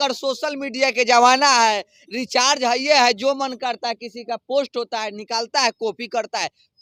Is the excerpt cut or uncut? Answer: uncut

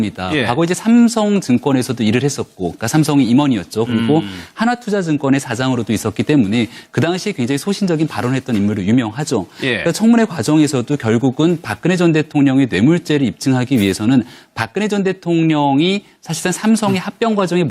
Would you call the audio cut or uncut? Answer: cut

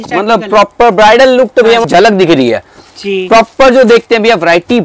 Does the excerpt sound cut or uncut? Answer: cut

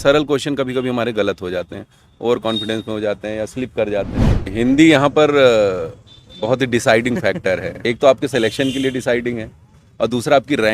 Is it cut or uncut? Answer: cut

